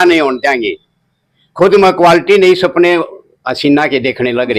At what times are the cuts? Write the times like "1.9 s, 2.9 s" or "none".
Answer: none